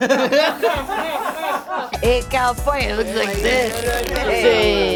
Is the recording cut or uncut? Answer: uncut